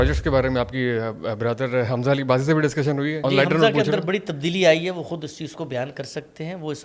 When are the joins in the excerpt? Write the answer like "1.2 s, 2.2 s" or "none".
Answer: 3.2 s